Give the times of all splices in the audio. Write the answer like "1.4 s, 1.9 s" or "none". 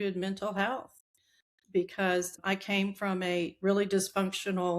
2.4 s